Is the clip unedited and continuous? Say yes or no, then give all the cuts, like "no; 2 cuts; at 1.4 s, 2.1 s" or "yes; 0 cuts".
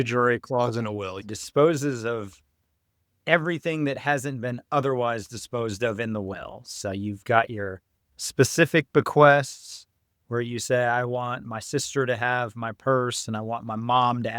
no; 1 cut; at 1.3 s